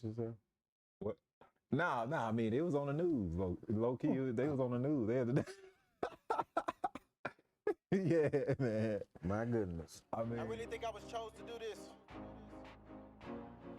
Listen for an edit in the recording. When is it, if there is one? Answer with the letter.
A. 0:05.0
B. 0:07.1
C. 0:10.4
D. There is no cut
C